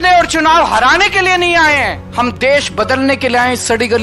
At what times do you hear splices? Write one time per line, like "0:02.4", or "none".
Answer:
0:02.0